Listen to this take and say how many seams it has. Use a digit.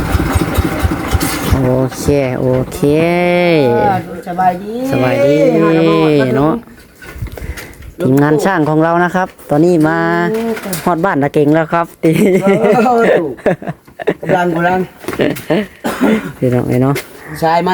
0